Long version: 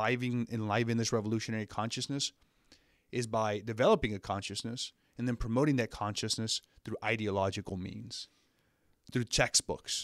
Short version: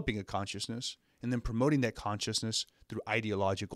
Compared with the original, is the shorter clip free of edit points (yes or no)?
yes